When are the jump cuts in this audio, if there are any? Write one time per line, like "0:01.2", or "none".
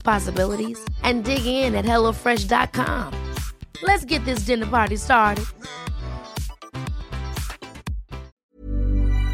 0:08.4

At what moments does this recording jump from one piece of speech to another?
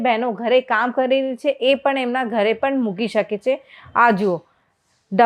none

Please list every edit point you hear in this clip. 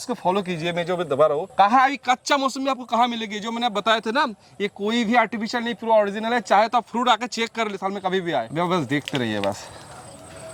none

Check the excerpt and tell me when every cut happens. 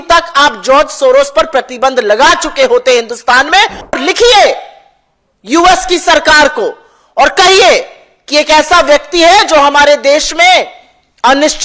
0:03.9

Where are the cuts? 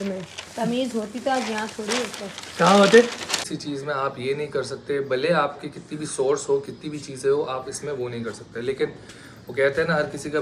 0:03.4

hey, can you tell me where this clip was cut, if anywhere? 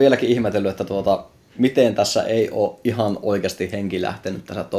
none

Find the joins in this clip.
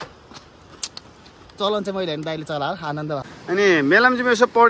0:03.3

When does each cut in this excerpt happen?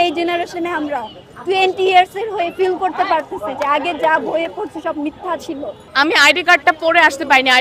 0:05.8

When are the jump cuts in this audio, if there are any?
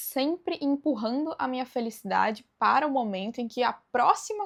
none

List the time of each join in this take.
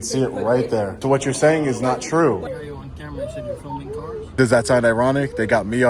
0:01.0
0:02.5
0:04.3

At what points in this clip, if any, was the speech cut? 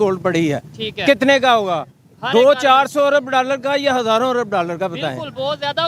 none

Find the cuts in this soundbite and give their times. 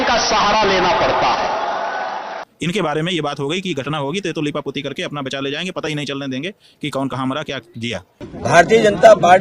0:02.5
0:08.2

